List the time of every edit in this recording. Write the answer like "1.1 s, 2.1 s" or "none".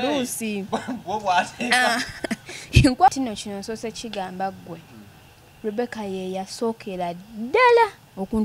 3.1 s